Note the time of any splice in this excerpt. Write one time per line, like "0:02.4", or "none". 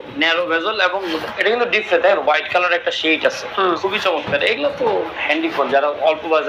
0:03.8